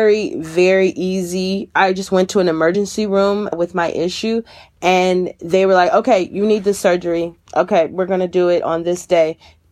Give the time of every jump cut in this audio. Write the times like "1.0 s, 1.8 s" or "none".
1.8 s